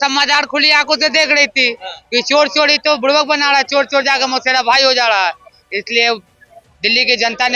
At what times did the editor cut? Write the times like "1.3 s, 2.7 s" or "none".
none